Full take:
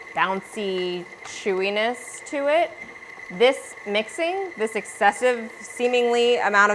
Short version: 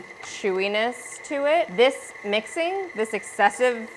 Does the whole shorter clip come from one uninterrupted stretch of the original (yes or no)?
no